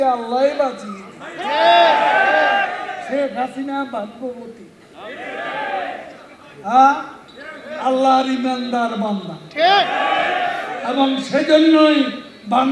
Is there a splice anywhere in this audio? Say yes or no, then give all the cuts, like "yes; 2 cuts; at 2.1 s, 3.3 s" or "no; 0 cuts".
no; 0 cuts